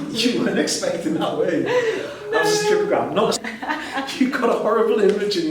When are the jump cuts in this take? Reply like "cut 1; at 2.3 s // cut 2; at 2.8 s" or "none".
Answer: cut 1; at 3.4 s